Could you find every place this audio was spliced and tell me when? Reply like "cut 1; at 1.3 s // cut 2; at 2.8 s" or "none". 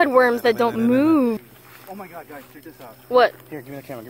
cut 1; at 1.4 s